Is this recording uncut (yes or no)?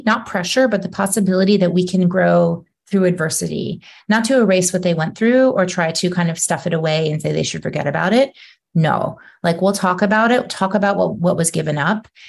yes